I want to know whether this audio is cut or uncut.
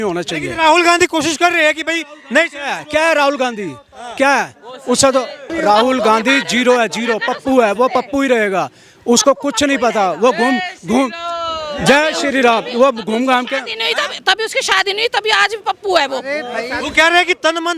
cut